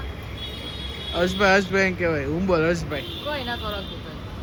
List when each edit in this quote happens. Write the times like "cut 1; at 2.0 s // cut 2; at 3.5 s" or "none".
none

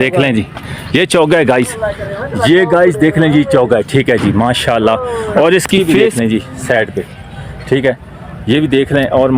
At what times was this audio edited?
cut 1; at 6.0 s

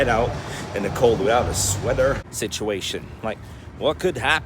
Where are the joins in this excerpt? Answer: cut 1; at 2.3 s

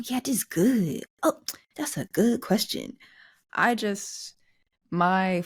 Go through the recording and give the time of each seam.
none

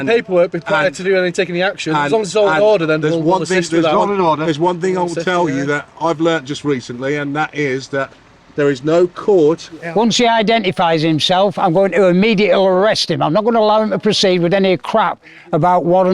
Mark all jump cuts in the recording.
cut 1; at 9.7 s

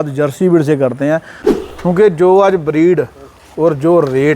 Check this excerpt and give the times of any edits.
cut 1; at 1.4 s

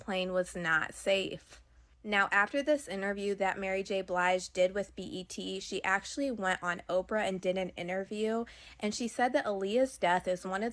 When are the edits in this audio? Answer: none

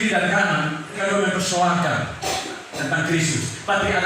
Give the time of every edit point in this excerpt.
cut 1; at 1.0 s

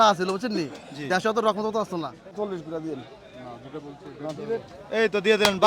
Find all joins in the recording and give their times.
cut 1; at 2.3 s

